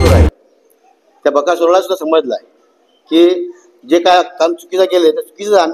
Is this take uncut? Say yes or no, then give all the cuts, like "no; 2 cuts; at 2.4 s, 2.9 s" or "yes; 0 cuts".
yes; 0 cuts